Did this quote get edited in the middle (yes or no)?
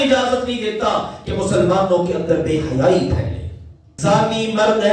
yes